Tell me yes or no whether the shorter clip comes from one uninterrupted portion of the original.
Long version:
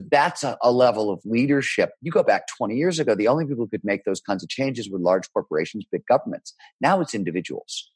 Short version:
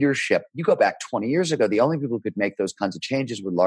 yes